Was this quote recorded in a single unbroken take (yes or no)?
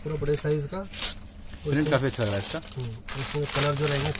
yes